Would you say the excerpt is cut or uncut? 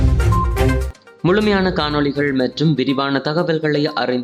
uncut